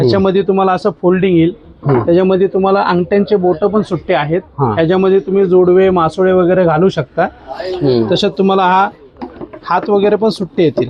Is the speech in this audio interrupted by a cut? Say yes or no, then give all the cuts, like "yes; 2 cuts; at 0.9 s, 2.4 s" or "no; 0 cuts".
no; 0 cuts